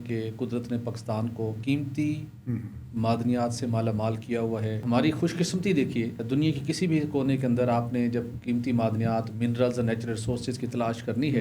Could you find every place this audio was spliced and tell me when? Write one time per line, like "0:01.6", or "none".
0:01.6
0:04.8
0:06.2

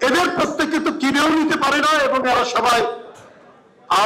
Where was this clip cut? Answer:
none

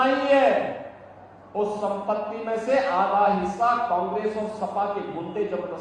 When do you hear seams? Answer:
none

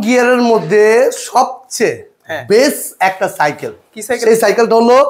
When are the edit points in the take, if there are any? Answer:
none

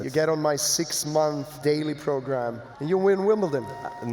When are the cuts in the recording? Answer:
0:01.6
0:02.7

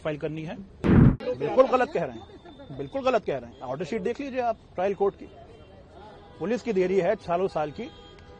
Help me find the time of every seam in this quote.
0:01.1

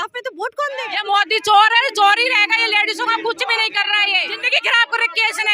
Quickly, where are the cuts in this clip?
0:00.8
0:04.4

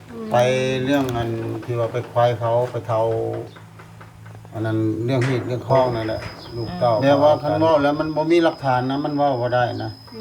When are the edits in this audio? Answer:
0:07.0

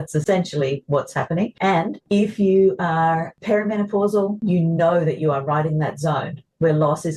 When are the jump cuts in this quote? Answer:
0:01.8
0:03.4
0:04.4

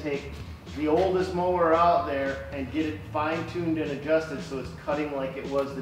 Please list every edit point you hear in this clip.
none

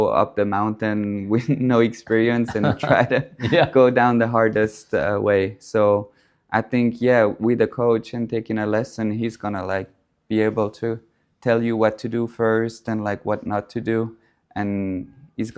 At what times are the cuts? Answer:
none

